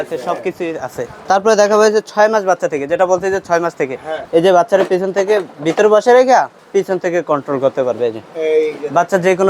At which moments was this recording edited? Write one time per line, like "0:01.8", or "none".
0:01.1
0:04.2
0:06.6